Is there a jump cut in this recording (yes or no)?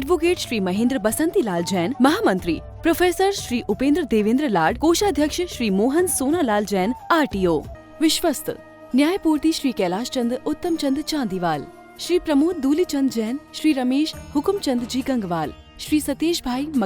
yes